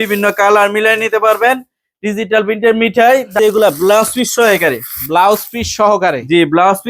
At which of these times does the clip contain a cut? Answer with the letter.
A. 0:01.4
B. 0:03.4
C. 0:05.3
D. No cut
B